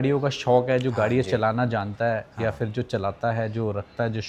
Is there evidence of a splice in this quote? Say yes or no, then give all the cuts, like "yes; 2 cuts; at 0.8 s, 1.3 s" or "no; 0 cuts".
no; 0 cuts